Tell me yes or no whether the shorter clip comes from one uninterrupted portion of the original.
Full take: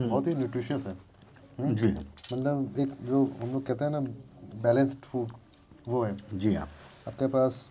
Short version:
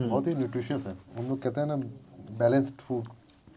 no